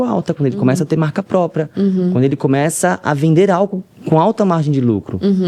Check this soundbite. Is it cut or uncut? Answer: uncut